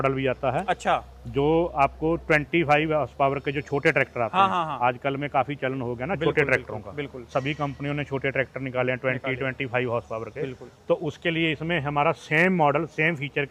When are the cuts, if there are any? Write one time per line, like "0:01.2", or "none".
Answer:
none